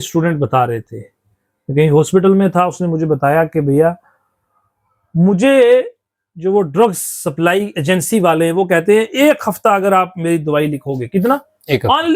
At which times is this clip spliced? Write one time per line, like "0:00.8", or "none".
none

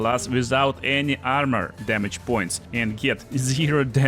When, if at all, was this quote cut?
0:01.8

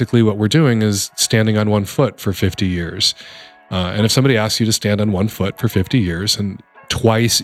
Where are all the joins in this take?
none

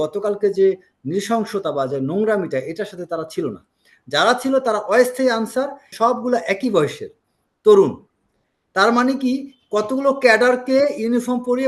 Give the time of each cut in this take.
0:05.9

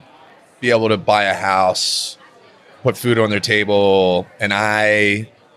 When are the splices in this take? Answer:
none

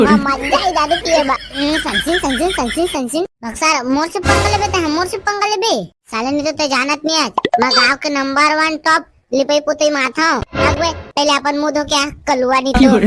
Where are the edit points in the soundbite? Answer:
none

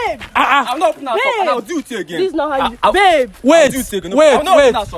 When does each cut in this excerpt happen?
none

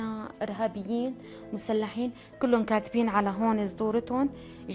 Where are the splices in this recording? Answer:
none

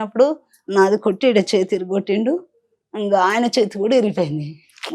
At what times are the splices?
none

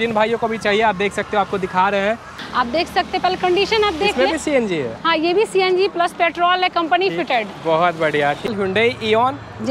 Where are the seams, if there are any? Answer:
0:02.4
0:08.5

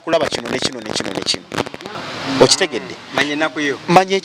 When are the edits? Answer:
0:02.0

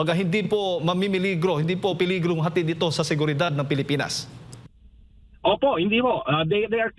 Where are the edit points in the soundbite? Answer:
none

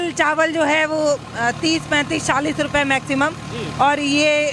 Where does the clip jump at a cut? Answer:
none

